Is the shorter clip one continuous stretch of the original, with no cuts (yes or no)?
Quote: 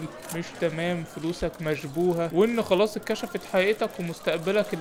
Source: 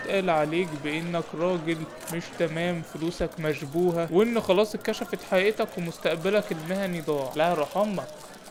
yes